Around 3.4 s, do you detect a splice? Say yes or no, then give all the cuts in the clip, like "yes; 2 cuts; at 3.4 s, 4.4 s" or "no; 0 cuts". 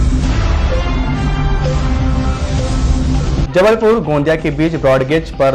yes; 1 cut; at 3.4 s